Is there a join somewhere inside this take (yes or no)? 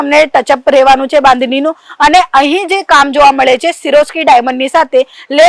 no